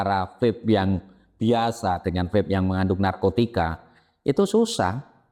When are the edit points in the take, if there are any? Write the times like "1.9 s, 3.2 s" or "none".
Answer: none